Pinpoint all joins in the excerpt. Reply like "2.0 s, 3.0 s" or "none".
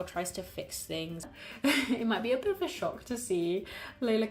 1.3 s